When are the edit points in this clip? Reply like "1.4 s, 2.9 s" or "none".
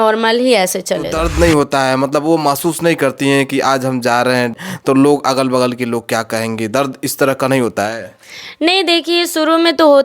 1.2 s, 4.5 s